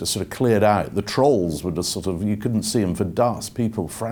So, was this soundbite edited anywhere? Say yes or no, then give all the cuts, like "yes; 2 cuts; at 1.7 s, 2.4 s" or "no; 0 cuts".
no; 0 cuts